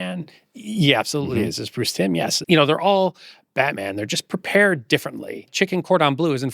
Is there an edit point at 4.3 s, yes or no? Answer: no